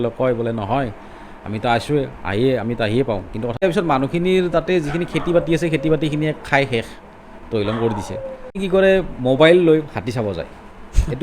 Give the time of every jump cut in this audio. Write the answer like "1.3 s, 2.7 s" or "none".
3.6 s, 8.6 s